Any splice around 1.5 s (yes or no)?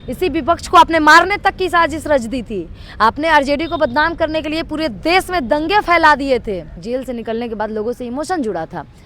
no